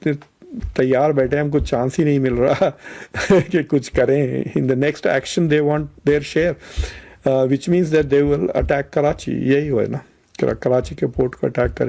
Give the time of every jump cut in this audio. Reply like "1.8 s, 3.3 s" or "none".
none